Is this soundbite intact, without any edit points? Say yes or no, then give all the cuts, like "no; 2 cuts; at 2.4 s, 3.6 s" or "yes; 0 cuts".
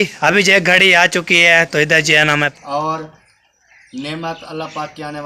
no; 1 cut; at 2.5 s